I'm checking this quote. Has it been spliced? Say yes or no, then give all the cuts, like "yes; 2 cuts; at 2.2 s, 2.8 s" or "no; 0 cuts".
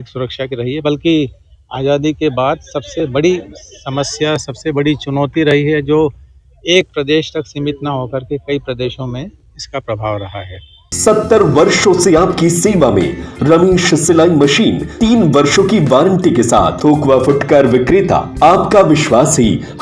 yes; 4 cuts; at 10.9 s, 14.9 s, 16.7 s, 18.3 s